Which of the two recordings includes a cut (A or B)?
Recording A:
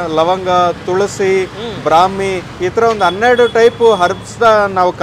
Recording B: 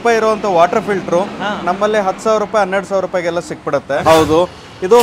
B